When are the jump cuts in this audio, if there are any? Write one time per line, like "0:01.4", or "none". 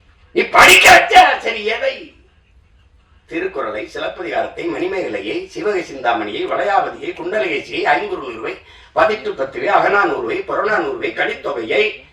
none